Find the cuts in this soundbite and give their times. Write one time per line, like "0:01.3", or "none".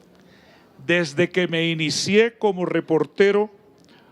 0:01.9